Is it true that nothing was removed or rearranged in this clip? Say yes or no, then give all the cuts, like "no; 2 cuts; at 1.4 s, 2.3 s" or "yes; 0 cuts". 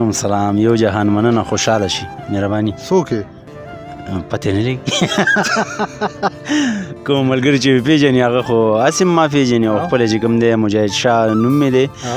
yes; 0 cuts